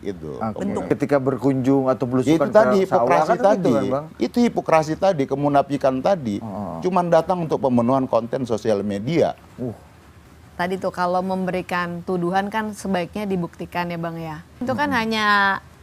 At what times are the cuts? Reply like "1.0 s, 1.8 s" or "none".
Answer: 0.9 s, 10.3 s, 14.6 s

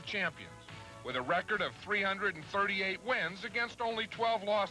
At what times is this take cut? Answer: 1.5 s

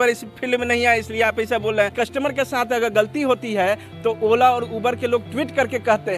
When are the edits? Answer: 1.9 s

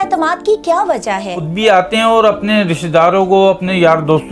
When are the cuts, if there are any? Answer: 1.5 s

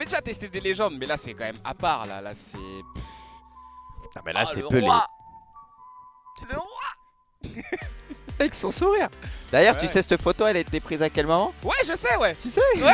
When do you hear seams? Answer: none

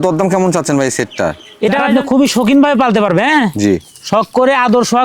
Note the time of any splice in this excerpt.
1.8 s

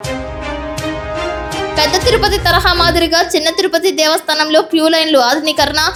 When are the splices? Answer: none

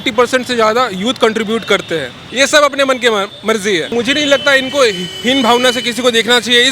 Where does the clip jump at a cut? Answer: 2.2 s, 3.9 s

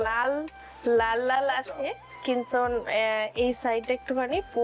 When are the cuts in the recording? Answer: none

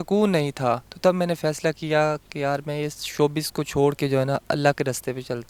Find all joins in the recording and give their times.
none

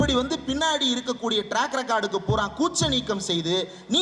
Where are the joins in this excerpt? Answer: none

